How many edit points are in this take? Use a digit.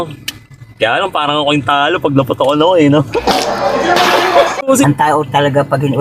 1